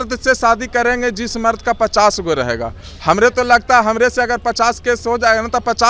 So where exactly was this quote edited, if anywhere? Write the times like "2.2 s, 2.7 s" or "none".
none